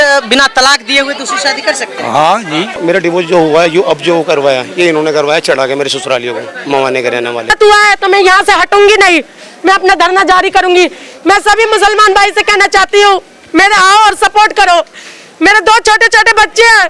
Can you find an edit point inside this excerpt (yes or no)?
yes